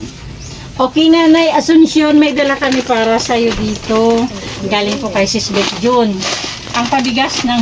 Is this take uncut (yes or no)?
yes